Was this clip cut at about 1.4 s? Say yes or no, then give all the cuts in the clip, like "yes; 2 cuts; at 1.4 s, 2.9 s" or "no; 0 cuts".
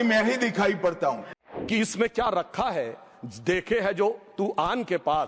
yes; 1 cut; at 1.4 s